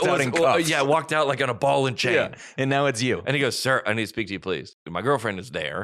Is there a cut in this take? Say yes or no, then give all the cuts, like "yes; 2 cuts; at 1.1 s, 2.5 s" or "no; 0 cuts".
yes; 1 cut; at 4.8 s